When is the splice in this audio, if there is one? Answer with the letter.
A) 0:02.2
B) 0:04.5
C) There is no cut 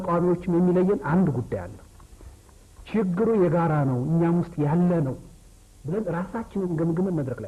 C